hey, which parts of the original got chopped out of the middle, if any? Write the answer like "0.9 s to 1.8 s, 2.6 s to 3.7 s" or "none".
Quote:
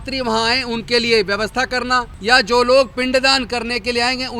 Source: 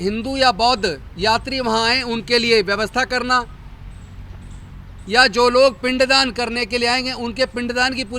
3.5 s to 5.0 s